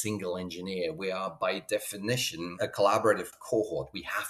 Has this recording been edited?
yes; 2 cuts; at 2.5 s, 3.3 s

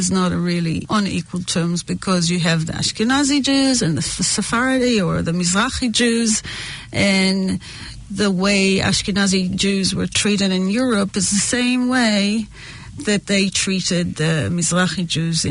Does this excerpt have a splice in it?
no; 0 cuts

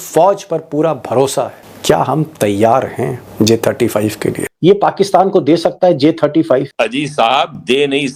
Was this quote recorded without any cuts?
no; 2 cuts; at 1.6 s, 4.5 s

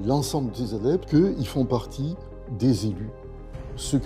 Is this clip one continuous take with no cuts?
no; 1 cut; at 1.1 s

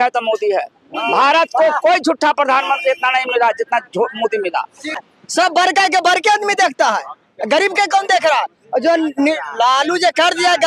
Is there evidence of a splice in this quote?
yes; 1 cut; at 5.0 s

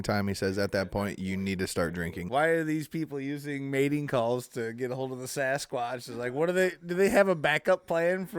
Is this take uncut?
no; 1 cut; at 2.1 s

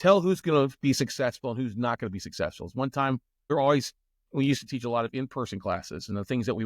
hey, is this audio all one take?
no; 1 cut; at 3.3 s

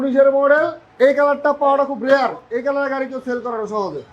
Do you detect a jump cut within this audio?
no; 0 cuts

